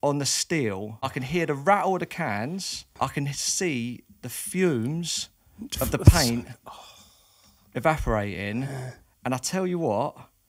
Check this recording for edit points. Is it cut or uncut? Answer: cut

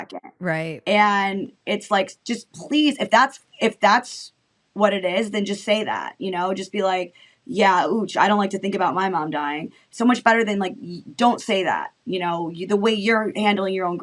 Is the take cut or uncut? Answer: uncut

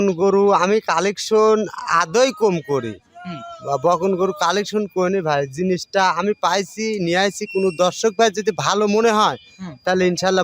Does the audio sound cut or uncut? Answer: uncut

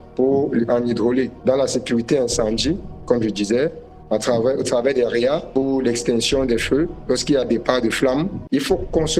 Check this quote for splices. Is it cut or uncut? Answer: cut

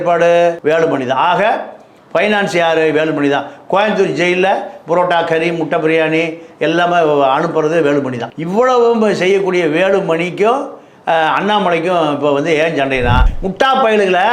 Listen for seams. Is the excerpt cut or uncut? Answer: cut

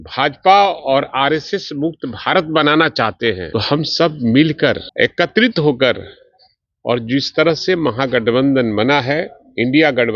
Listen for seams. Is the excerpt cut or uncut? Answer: cut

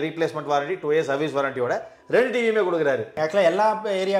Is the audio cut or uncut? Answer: cut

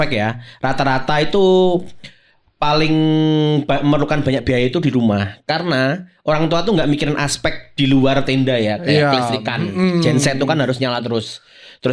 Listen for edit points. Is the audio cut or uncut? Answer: uncut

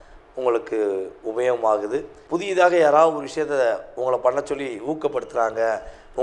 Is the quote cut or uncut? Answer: cut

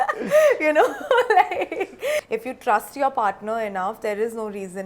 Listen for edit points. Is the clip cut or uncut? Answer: cut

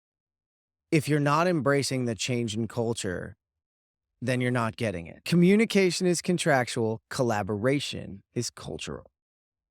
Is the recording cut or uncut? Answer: cut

